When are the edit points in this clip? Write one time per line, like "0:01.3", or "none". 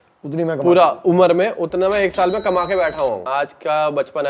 0:03.3